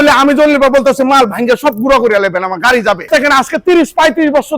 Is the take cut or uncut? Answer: cut